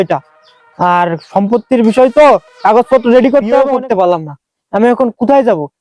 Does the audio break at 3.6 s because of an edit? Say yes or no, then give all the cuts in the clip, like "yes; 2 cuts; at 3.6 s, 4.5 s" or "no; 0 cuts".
yes; 1 cut; at 3.6 s